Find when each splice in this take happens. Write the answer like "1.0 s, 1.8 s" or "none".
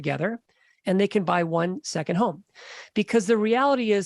none

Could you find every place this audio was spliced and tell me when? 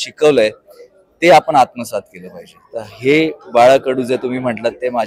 none

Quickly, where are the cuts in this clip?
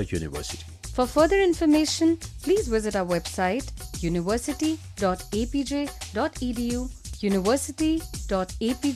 7.0 s

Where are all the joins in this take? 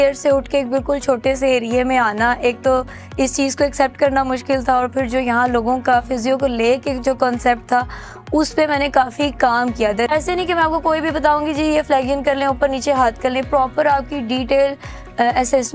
10.1 s

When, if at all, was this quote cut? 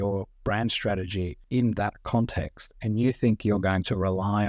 1.4 s

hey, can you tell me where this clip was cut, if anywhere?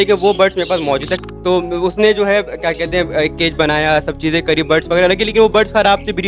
1.1 s

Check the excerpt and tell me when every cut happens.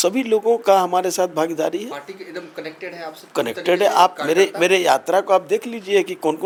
none

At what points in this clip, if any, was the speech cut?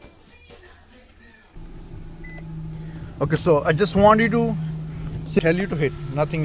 1.6 s, 5.4 s

